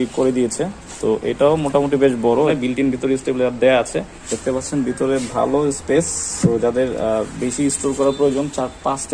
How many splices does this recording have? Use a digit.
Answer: 3